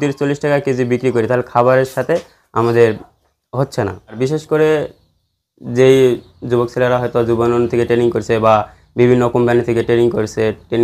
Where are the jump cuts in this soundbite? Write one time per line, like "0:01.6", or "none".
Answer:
0:04.2

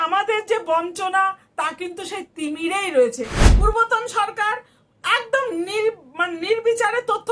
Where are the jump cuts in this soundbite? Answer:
0:03.4

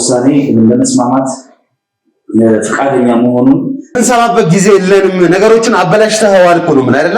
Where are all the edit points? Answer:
0:04.0

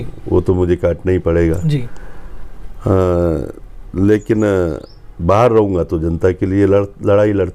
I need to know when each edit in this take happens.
none

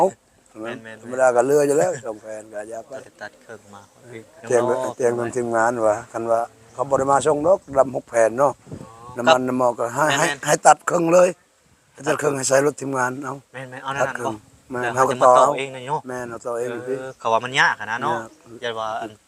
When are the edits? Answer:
0:04.4

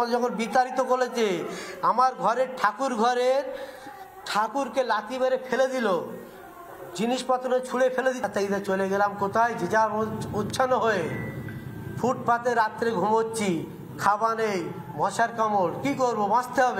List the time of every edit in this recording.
0:08.3

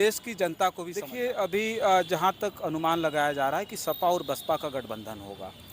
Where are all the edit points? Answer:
0:01.1

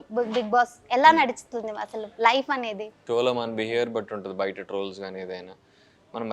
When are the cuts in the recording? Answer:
0:02.9

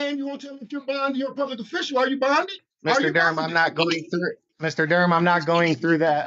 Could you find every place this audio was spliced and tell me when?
0:02.6
0:04.5

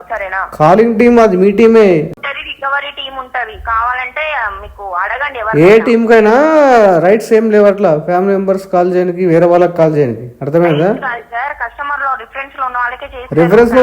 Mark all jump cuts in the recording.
0:02.1

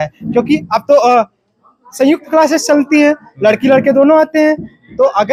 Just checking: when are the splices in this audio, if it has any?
none

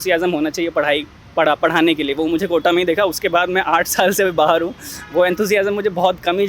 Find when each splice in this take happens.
none

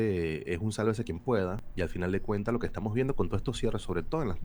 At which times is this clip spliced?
0:01.3

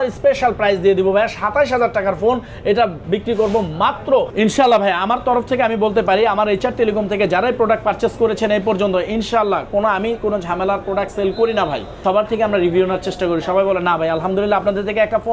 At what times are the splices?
0:04.3
0:11.9

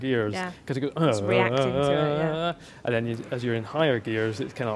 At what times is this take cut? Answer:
none

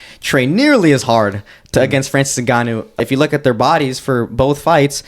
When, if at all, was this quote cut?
0:03.0

